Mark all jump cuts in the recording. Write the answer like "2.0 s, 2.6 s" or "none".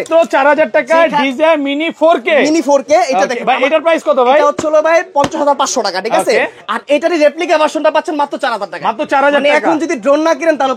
none